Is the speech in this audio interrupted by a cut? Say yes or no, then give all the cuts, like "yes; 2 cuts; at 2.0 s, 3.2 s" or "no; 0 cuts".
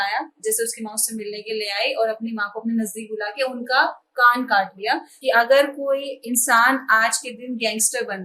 yes; 1 cut; at 5.1 s